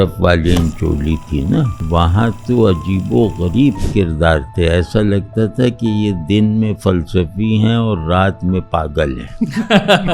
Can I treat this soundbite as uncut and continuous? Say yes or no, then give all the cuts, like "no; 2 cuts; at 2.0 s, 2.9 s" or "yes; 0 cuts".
no; 1 cut; at 1.8 s